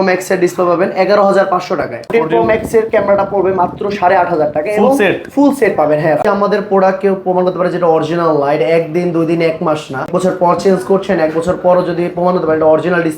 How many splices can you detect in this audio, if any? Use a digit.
3